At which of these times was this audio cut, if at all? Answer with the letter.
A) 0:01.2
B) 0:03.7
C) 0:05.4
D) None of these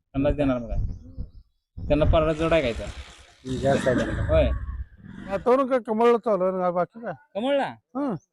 C